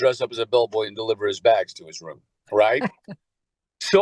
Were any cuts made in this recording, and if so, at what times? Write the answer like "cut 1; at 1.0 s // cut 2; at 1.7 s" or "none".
none

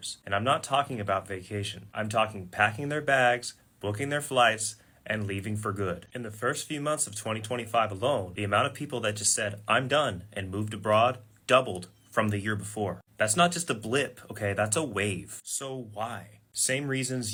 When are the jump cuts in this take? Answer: none

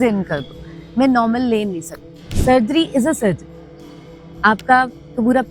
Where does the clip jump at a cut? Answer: cut 1; at 2.2 s

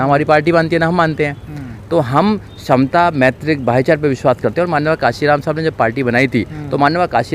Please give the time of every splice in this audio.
none

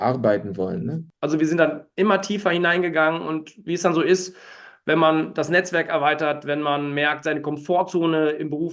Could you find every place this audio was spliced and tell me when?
cut 1; at 1.0 s

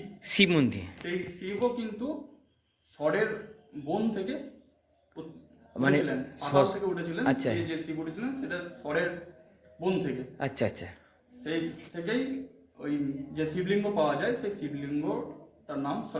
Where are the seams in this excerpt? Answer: none

